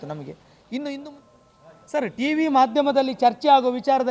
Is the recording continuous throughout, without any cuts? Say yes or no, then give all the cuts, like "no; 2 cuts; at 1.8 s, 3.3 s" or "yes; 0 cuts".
no; 1 cut; at 1.0 s